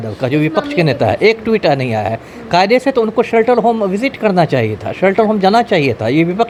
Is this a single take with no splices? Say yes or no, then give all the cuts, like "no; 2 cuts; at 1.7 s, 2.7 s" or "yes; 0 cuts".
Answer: yes; 0 cuts